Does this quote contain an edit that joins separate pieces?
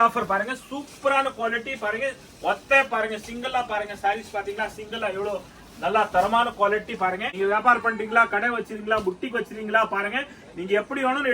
yes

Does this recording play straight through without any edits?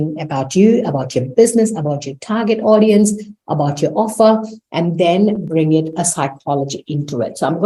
yes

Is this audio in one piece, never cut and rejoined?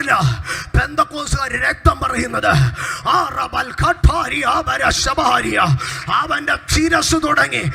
yes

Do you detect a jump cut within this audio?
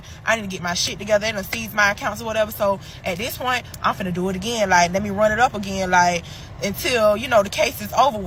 no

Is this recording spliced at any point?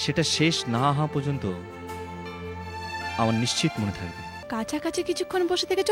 yes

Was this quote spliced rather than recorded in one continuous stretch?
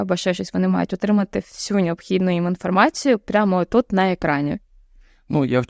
no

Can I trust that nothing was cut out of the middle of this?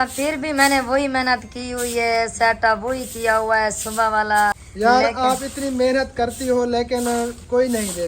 no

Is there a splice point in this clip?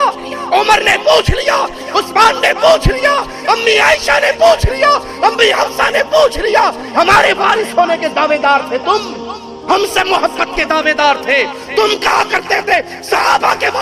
no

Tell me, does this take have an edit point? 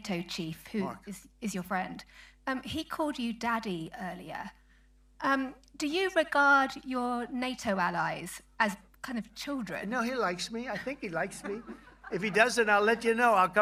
no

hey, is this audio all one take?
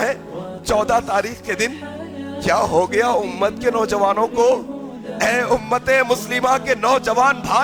yes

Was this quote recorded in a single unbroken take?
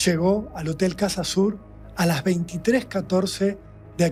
yes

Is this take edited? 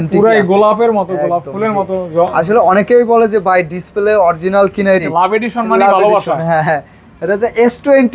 yes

